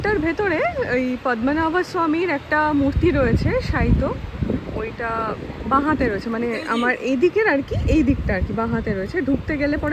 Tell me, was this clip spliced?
no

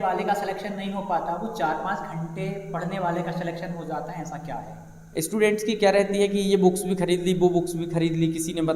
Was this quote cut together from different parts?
yes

